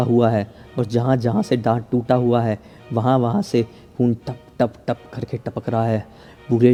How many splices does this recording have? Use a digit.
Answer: 0